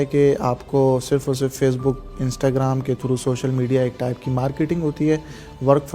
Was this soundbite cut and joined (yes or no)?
no